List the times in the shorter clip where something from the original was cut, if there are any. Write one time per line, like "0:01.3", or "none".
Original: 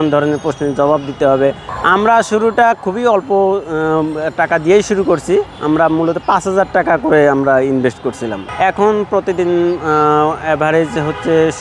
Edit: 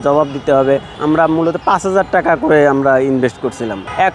0:00.9